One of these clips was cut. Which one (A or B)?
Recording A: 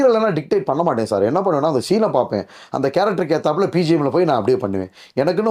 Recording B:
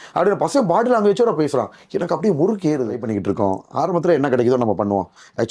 B